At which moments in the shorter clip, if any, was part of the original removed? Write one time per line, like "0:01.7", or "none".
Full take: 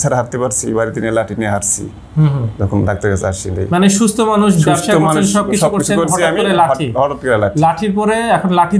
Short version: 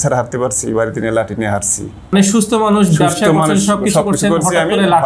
0:02.1